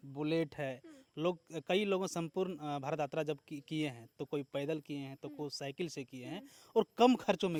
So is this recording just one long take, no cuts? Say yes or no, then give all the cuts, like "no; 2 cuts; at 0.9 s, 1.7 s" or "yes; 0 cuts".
yes; 0 cuts